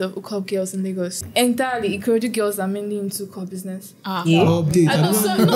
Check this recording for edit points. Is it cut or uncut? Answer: cut